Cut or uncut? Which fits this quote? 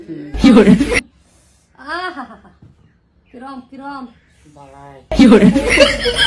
cut